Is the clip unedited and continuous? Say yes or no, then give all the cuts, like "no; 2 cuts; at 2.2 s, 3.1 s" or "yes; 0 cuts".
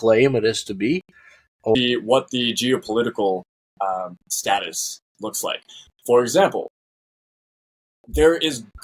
no; 1 cut; at 1.8 s